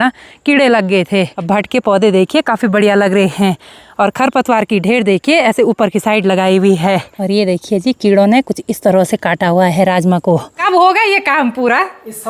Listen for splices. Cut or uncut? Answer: cut